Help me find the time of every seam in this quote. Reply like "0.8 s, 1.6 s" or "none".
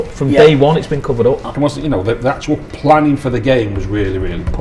1.5 s